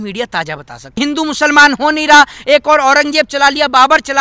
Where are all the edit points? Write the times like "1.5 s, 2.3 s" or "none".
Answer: 1.0 s

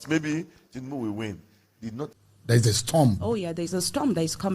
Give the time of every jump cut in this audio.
2.1 s

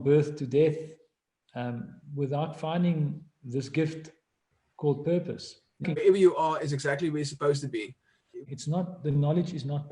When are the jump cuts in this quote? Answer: 6.0 s, 8.5 s

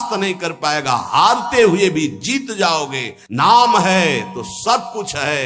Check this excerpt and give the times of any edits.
3.2 s

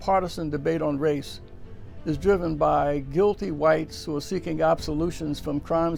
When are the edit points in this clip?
none

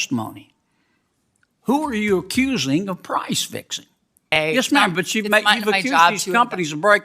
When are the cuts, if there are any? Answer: 4.4 s

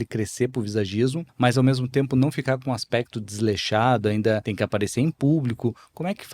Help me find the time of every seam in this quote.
1.2 s, 4.5 s

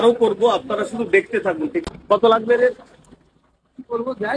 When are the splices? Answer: 1.8 s

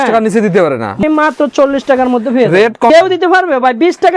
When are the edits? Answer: 1.0 s, 2.9 s

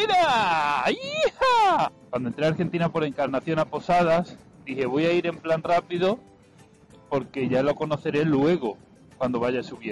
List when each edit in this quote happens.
1.9 s

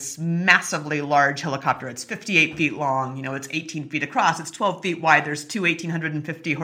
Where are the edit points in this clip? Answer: none

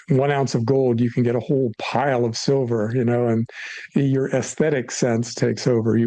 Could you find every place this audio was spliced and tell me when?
none

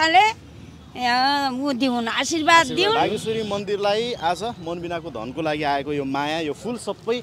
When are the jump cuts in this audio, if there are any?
3.0 s

